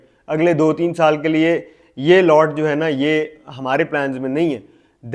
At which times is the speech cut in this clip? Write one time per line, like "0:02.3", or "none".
none